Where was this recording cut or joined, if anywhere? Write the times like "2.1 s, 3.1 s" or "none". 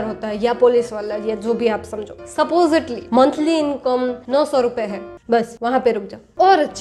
none